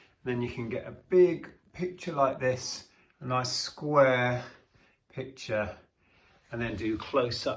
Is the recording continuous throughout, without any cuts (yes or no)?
yes